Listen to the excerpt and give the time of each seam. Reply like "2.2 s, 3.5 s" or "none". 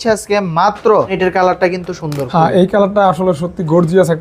1.2 s